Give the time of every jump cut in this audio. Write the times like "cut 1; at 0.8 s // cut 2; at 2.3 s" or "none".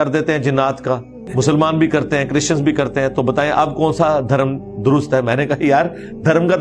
cut 1; at 1.2 s